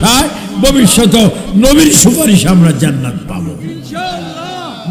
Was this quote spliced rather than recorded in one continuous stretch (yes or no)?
no